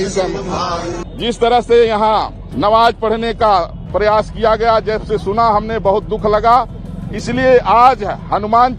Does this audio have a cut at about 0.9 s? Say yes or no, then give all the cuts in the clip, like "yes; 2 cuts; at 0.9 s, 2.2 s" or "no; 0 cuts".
yes; 1 cut; at 0.9 s